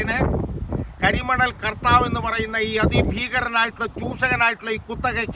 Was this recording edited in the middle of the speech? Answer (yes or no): no